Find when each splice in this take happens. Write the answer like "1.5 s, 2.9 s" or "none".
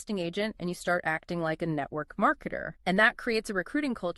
2.7 s